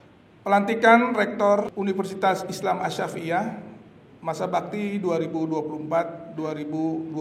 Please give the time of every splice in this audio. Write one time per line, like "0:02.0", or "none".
0:01.7